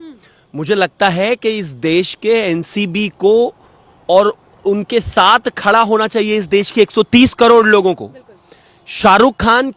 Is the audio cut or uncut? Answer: uncut